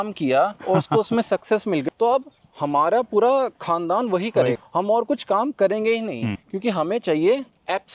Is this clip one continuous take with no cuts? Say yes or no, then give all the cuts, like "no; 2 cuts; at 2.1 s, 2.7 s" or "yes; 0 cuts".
yes; 0 cuts